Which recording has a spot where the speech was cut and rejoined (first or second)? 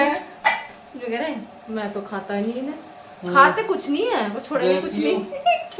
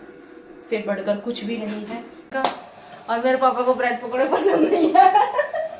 second